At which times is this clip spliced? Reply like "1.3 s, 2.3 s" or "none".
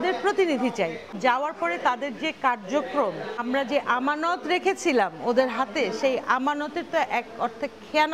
1.1 s, 3.4 s